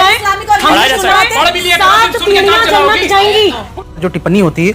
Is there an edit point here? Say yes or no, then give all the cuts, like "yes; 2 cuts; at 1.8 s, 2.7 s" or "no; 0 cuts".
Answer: yes; 1 cut; at 3.8 s